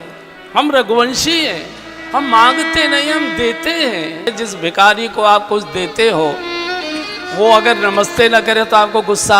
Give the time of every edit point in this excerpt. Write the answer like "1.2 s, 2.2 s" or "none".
4.3 s